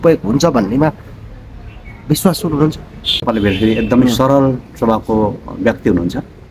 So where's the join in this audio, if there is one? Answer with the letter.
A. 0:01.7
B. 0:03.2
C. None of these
B